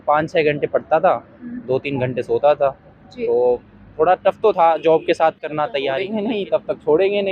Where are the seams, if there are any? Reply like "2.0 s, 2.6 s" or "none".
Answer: 6.0 s